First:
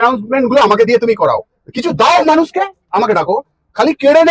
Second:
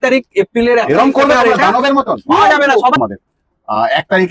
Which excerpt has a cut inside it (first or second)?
second